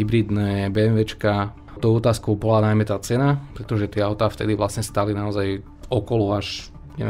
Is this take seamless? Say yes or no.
no